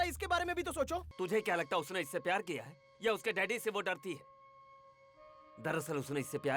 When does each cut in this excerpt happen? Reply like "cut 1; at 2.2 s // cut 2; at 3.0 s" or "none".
cut 1; at 1.1 s